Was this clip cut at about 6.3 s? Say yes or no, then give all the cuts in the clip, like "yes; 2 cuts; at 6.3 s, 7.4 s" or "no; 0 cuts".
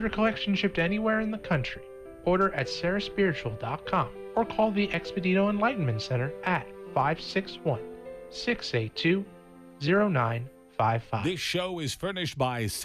no; 1 cut; at 11.2 s